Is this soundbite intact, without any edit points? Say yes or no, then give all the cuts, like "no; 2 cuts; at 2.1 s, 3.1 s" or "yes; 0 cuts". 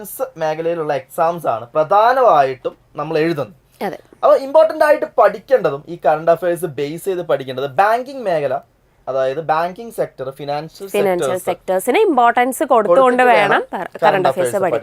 yes; 0 cuts